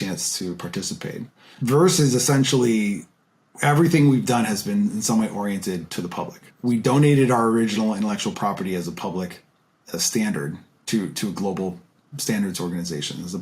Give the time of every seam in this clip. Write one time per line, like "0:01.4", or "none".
0:01.2
0:06.5